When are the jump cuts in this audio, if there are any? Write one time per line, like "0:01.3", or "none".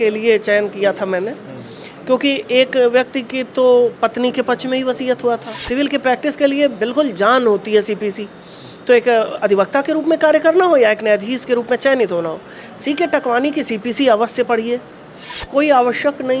0:05.5
0:15.4